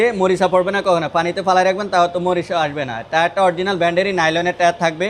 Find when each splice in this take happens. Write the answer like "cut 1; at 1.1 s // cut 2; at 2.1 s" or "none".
none